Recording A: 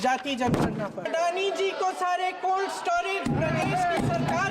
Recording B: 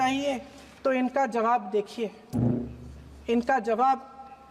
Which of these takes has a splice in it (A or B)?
A